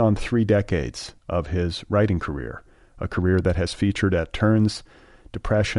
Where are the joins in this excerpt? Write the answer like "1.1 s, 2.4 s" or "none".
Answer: none